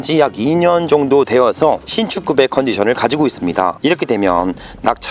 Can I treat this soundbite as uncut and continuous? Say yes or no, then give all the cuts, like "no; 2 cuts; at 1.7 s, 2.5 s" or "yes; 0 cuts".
yes; 0 cuts